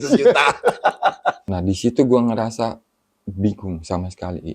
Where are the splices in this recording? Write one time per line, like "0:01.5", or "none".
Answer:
0:01.5